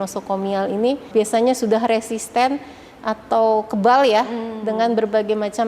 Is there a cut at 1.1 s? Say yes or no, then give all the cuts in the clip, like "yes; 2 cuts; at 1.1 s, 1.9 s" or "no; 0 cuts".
yes; 1 cut; at 1.1 s